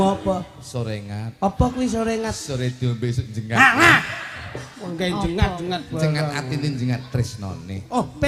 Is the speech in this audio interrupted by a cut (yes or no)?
no